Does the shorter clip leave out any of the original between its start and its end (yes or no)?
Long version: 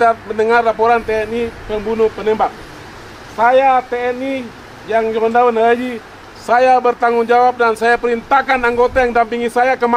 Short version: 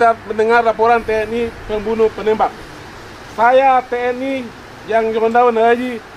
no